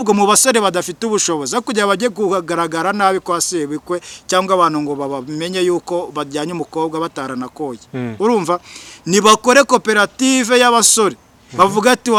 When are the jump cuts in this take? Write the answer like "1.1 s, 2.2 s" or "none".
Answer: none

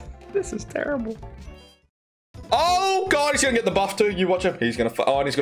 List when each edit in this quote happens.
none

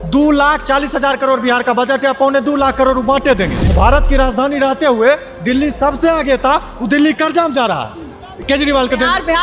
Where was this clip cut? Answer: 3.6 s

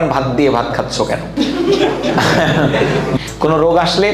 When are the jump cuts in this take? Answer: 1.3 s, 3.2 s

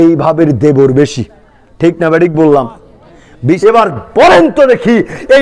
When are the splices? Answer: 3.5 s

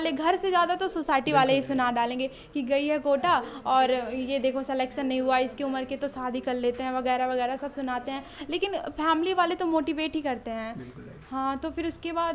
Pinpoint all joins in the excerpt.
none

